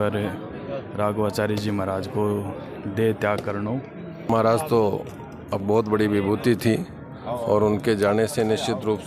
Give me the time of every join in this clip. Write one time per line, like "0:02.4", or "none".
0:04.3